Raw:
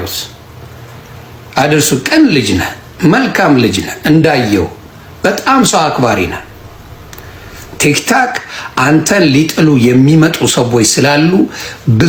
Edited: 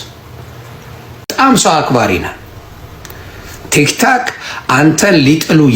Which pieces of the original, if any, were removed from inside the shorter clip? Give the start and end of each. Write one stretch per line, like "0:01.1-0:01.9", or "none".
0:01.5-0:05.4